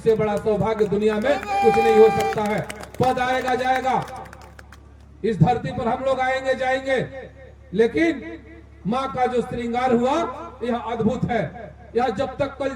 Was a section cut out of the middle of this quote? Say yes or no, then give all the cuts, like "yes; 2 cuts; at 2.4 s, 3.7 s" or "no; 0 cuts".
no; 0 cuts